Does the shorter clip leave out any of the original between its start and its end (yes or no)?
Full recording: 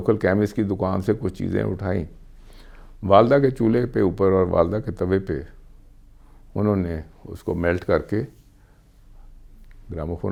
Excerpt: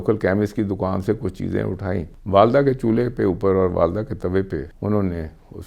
yes